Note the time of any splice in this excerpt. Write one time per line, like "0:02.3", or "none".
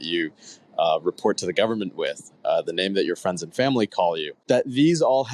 0:04.3